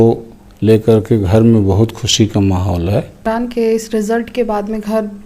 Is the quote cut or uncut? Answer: cut